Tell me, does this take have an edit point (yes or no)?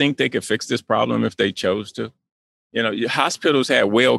no